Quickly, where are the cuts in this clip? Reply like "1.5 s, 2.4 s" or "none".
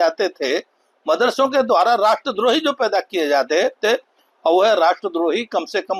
none